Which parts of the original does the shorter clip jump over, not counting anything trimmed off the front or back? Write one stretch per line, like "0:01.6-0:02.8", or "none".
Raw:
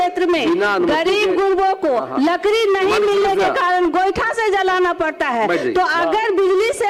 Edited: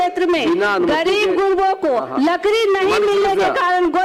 none